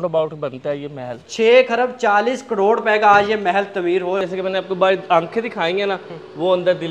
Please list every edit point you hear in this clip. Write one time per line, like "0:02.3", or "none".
0:01.2
0:04.2